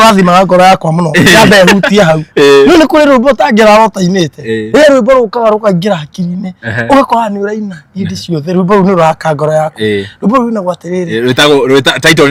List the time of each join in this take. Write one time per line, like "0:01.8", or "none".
none